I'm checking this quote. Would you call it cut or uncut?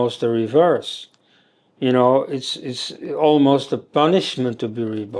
uncut